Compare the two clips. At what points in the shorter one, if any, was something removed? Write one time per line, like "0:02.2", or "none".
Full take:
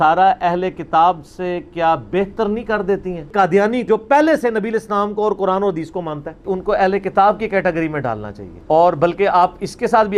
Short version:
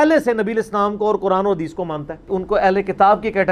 none